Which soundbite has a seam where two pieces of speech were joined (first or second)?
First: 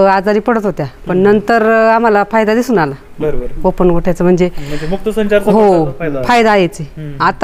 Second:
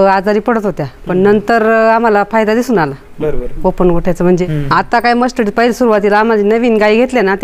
second